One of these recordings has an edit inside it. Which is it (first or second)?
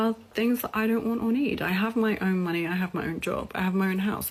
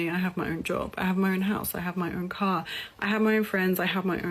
second